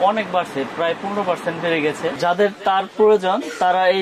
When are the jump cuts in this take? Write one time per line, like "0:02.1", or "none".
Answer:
0:02.1

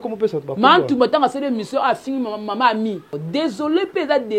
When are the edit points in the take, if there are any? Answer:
0:03.2

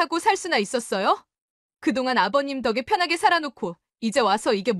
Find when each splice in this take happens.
none

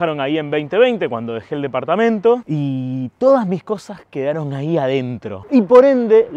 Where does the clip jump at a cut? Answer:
0:02.4
0:05.3

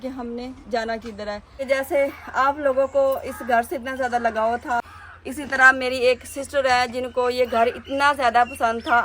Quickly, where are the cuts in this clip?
0:01.6
0:04.8

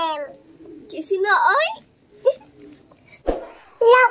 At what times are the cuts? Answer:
0:02.8

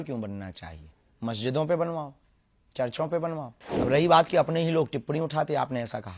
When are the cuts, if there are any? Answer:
0:03.6

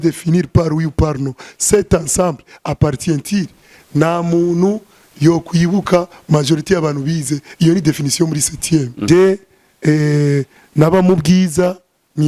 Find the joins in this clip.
0:08.9

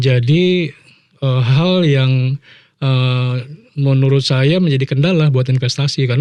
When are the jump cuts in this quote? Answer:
none

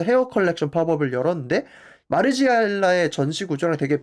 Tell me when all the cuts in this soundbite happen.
0:01.9

